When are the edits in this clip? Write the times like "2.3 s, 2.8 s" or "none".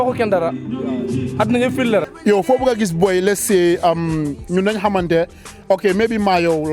2.1 s